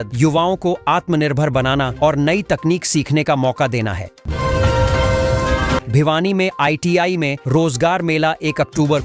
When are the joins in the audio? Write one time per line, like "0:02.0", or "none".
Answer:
none